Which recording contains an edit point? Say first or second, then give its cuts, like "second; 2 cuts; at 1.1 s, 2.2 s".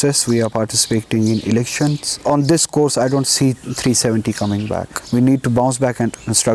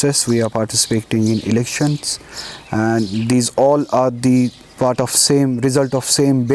first; 2 cuts; at 2.2 s, 4.9 s